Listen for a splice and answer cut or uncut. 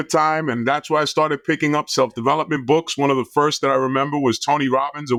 uncut